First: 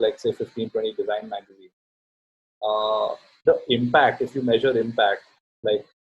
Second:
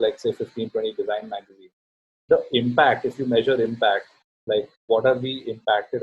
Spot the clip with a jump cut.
second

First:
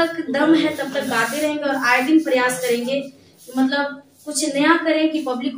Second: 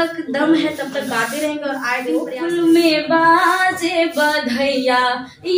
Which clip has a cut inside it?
second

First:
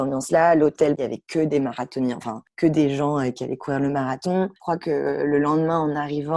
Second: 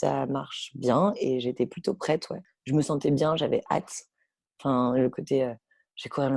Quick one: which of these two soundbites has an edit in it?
first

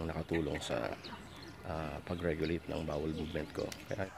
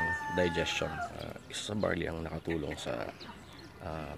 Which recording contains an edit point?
second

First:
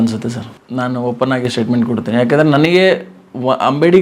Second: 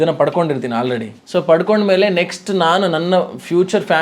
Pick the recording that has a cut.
second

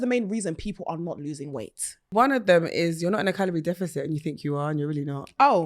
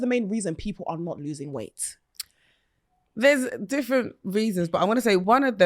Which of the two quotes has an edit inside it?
first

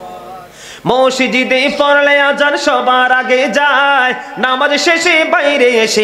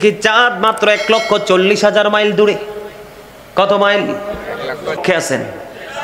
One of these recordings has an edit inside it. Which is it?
second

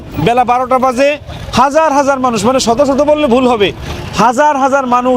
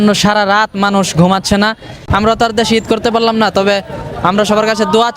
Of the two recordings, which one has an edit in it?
second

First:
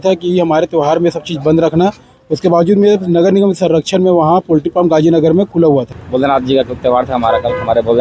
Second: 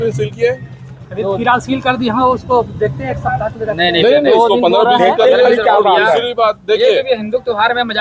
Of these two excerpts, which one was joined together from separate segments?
first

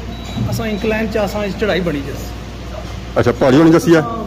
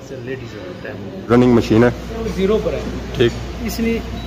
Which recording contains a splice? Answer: second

